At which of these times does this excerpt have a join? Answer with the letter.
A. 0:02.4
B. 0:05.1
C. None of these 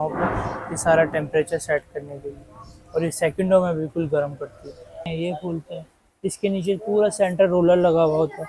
B